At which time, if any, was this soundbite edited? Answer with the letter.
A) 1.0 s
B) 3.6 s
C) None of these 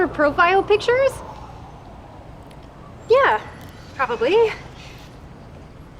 A